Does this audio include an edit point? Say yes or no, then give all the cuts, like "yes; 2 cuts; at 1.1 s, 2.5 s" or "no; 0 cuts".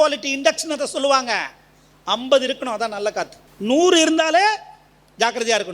yes; 1 cut; at 3.4 s